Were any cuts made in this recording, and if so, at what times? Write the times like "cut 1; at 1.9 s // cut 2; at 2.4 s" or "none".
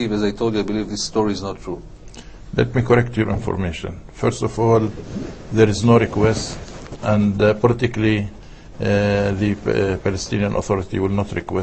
none